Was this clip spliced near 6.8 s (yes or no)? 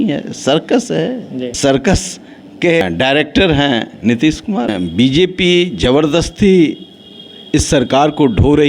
no